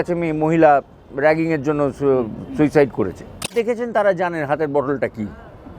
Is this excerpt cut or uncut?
cut